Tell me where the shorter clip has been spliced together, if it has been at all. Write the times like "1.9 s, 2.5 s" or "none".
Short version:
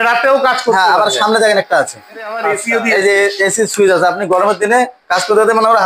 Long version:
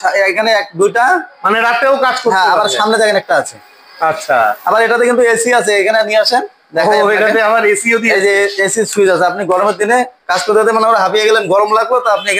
2.5 s